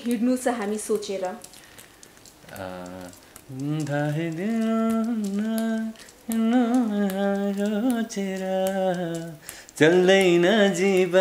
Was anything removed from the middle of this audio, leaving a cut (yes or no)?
no